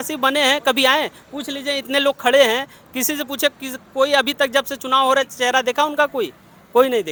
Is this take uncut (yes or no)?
yes